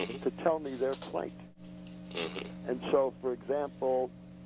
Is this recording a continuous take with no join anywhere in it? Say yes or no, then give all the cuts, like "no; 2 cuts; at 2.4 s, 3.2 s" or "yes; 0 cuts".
no; 1 cut; at 2.8 s